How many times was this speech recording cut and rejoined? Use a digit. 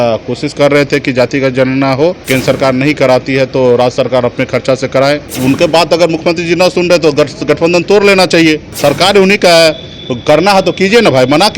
3